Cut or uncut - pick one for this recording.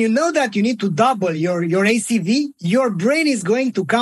cut